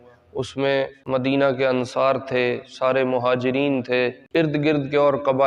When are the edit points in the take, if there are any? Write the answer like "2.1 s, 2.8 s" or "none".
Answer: 1.0 s, 4.2 s

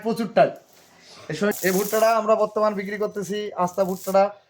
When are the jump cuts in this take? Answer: 1.5 s

